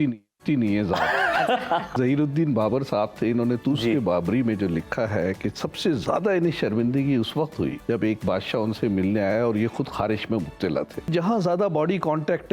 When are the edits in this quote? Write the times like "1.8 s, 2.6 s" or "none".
1.9 s, 7.8 s, 11.1 s